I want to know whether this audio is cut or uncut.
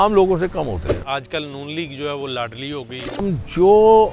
cut